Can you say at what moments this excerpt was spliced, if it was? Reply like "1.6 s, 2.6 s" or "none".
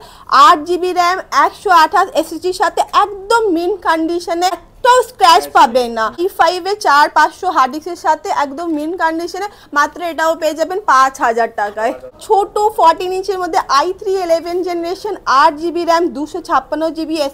4.7 s, 6.2 s, 12.1 s